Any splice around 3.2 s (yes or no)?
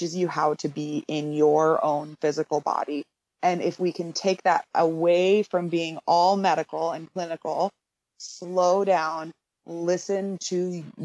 yes